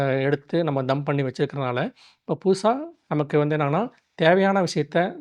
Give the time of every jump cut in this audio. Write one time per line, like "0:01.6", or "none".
0:02.9